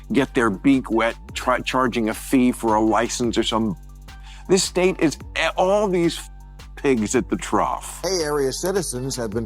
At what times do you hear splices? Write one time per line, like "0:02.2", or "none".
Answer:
0:07.9